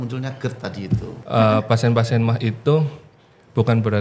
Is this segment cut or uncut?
cut